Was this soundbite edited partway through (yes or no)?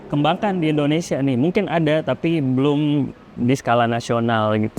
no